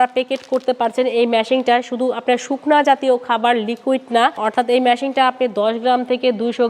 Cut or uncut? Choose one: cut